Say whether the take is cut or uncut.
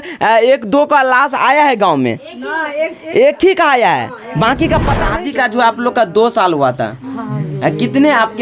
cut